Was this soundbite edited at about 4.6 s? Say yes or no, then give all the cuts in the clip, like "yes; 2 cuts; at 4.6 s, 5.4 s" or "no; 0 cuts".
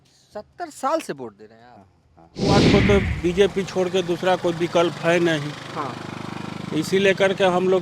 no; 1 cut; at 2.6 s